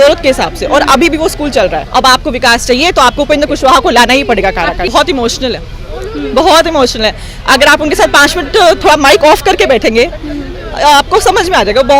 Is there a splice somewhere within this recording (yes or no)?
yes